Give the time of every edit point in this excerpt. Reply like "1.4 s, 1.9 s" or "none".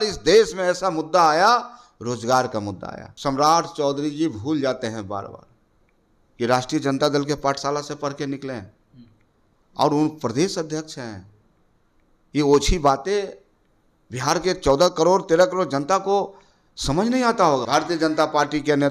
3.1 s, 17.6 s